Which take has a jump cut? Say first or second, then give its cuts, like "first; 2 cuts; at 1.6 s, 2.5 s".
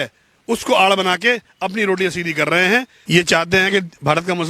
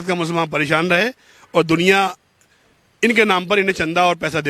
first; 1 cut; at 2.9 s